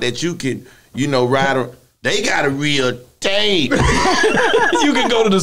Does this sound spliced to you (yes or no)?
no